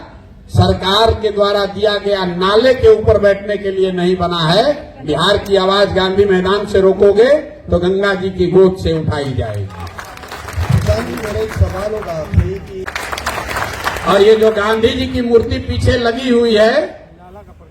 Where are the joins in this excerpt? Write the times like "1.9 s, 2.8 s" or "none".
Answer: 12.9 s